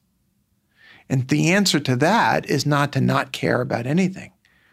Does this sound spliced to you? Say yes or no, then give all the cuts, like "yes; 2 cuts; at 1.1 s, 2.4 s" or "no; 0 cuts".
no; 0 cuts